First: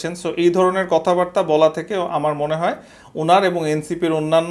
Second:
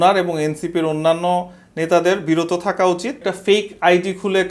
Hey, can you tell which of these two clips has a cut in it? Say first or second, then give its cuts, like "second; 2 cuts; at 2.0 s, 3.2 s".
second; 1 cut; at 3.2 s